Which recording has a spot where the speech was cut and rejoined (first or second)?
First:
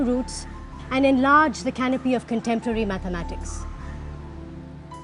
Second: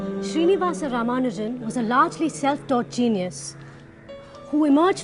first